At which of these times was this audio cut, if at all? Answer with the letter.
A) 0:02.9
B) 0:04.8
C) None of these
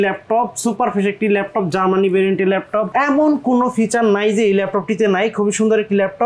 A